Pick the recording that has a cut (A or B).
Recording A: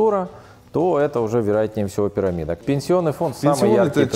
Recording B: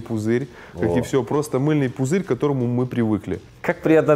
A